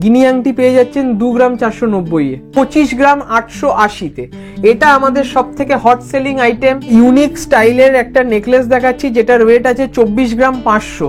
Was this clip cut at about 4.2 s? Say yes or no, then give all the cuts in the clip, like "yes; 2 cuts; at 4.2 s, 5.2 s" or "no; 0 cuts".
no; 2 cuts; at 2.4 s, 6.8 s